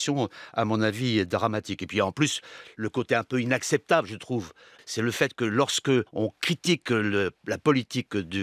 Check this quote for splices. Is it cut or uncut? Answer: cut